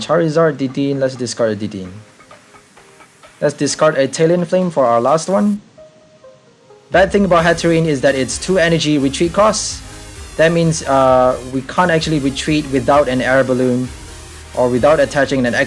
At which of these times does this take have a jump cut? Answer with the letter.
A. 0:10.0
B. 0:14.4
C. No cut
C